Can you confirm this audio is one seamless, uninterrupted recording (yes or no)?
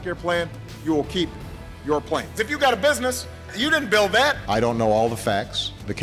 yes